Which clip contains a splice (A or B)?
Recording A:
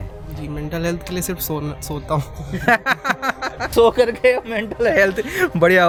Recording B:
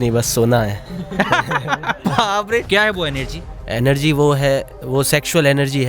B